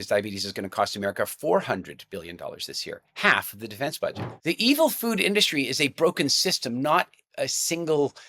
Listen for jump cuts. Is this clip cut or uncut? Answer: cut